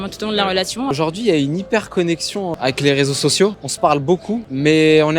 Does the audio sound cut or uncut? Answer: cut